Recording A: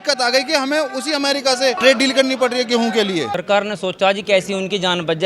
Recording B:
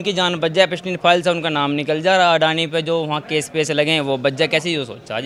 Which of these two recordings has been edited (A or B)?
A